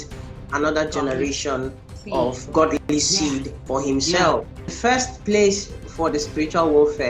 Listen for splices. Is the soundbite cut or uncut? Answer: cut